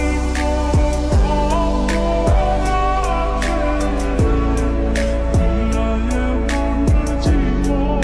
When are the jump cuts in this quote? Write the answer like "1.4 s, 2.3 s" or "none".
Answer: none